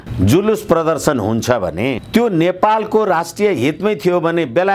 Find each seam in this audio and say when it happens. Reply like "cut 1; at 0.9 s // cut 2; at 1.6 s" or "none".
none

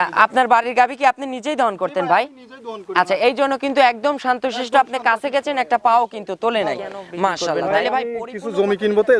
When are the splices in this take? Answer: cut 1; at 8.2 s

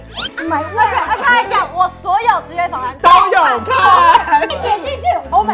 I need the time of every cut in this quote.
cut 1; at 4.5 s

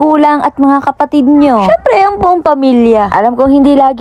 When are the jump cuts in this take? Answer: none

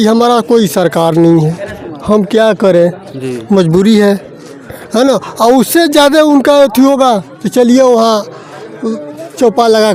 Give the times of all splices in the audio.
none

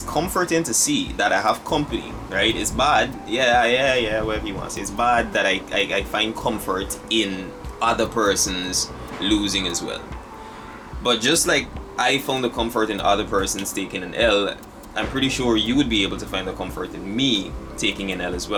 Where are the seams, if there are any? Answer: none

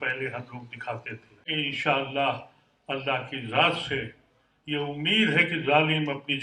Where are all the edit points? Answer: cut 1; at 1.5 s

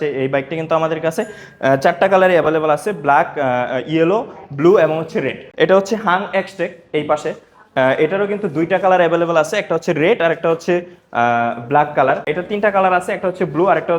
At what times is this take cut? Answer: cut 1; at 5.4 s // cut 2; at 12.4 s

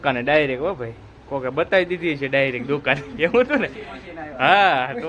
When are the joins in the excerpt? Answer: none

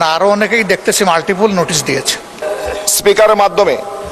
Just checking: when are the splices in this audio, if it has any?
cut 1; at 2.4 s

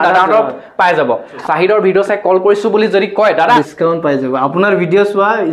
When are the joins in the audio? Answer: cut 1; at 1.3 s // cut 2; at 3.6 s

